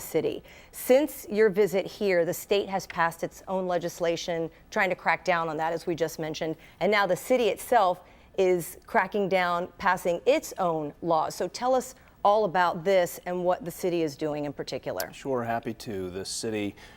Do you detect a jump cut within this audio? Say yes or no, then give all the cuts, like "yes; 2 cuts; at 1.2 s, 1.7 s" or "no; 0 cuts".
no; 0 cuts